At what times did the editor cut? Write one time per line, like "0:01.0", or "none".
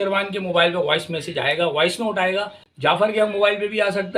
0:02.6